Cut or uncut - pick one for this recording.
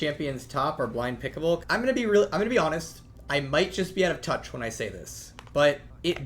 cut